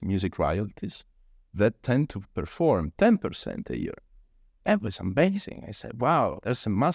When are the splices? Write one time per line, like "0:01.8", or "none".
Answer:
none